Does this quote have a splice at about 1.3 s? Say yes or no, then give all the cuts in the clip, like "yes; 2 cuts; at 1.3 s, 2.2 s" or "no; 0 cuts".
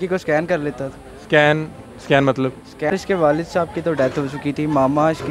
no; 1 cut; at 2.9 s